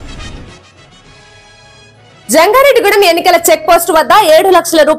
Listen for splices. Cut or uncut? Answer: cut